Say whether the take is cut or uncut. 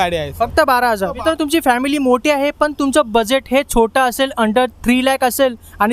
cut